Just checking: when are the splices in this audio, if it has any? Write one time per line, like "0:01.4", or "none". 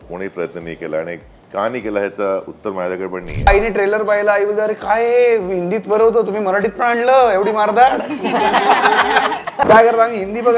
0:03.5
0:09.6